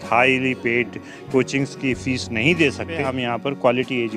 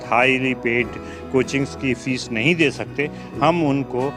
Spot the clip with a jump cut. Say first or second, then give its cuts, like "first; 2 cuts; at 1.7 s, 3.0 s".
first; 1 cut; at 3.1 s